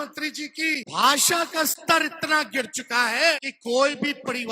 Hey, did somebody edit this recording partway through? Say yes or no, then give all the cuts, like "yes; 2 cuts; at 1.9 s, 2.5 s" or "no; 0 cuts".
yes; 2 cuts; at 0.9 s, 3.5 s